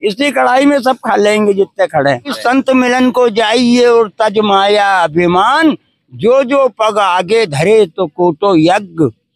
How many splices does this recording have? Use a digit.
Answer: 1